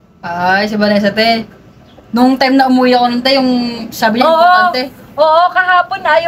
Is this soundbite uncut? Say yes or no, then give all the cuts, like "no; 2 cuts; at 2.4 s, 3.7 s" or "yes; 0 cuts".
yes; 0 cuts